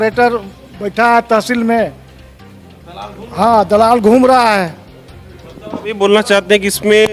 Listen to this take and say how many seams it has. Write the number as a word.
zero